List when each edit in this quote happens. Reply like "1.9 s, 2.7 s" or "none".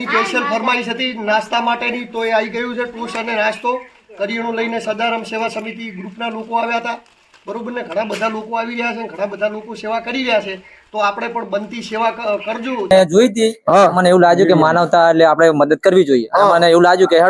12.9 s